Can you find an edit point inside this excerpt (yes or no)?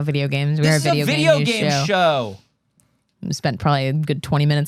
no